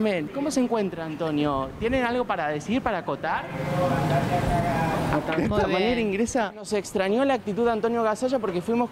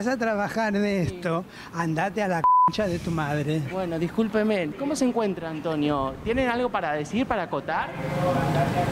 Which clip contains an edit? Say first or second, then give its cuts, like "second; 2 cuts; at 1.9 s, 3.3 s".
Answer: first; 1 cut; at 6.7 s